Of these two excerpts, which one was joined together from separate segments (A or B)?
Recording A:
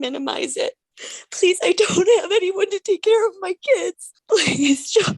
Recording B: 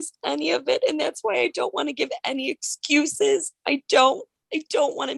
A